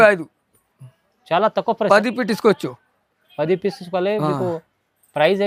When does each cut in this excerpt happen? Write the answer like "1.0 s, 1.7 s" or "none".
none